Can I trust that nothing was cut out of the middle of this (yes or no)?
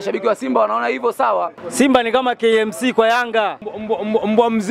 no